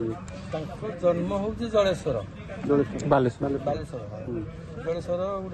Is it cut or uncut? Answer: uncut